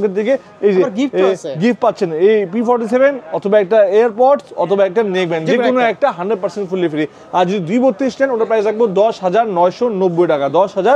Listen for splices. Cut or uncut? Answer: uncut